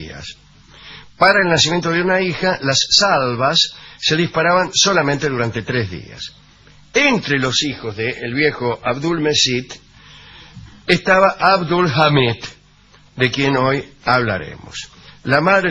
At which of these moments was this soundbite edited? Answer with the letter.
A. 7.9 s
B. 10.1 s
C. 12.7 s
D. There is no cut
B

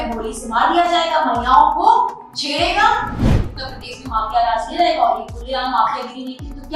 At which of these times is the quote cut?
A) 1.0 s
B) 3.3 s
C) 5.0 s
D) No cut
B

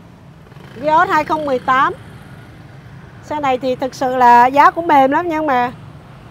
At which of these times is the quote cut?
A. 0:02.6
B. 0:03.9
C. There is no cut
C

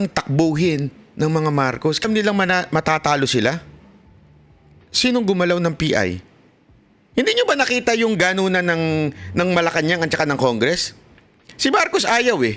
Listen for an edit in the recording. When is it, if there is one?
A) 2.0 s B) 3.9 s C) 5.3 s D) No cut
A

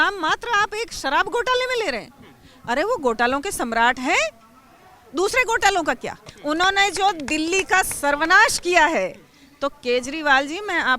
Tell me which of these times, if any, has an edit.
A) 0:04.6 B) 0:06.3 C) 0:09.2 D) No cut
B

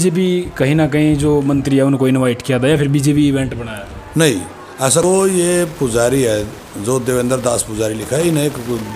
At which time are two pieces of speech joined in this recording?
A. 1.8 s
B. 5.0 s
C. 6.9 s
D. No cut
B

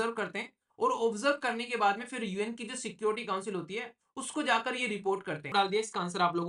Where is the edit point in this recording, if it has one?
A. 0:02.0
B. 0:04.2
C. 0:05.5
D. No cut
C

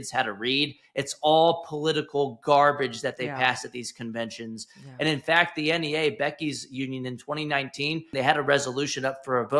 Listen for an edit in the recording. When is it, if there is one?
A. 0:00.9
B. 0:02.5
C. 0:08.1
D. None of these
C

